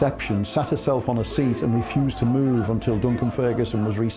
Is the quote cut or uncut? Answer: uncut